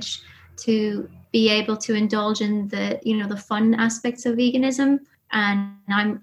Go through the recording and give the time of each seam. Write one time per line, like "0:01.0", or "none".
0:01.1
0:05.2

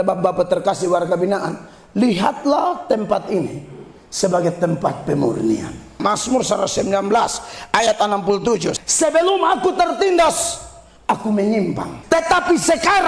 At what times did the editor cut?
0:06.0
0:08.8
0:11.9

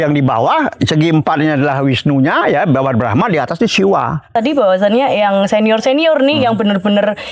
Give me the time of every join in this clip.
0:04.3

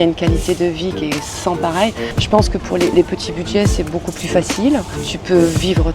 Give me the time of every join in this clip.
0:02.1
0:05.1

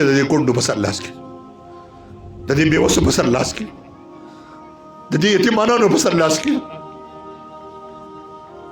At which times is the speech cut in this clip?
0:01.0
0:02.5
0:03.7
0:05.1
0:06.6

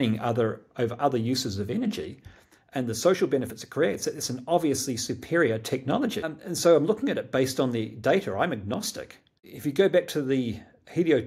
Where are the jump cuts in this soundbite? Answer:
0:06.3
0:09.4

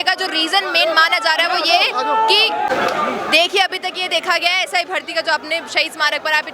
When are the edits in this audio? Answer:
none

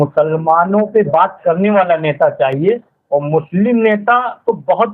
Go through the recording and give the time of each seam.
none

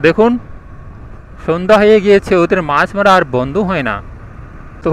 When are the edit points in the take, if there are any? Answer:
none

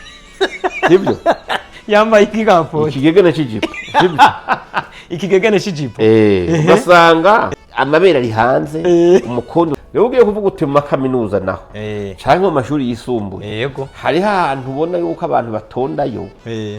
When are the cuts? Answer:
0:07.5
0:09.8

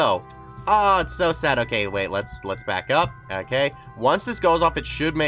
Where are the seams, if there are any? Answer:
none

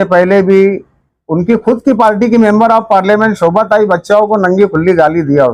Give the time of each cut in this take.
none

